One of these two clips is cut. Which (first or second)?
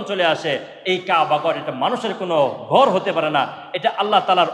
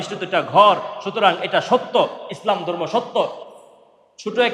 second